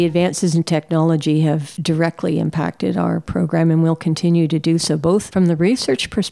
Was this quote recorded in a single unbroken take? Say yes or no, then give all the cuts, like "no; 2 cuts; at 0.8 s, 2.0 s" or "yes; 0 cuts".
no; 2 cuts; at 1.7 s, 5.3 s